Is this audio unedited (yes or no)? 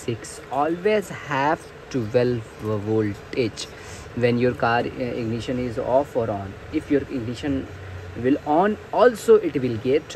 yes